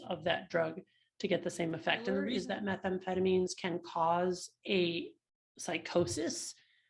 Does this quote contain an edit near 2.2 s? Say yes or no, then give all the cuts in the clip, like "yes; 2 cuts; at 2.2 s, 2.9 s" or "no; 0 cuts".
yes; 1 cut; at 2.2 s